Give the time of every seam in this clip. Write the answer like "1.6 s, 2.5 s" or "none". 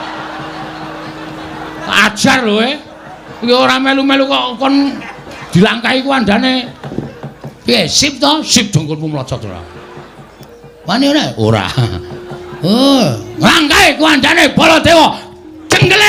none